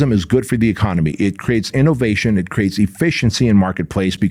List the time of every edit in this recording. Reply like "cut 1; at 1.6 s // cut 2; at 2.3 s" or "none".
none